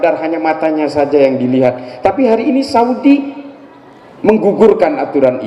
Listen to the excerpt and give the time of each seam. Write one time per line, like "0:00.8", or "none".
none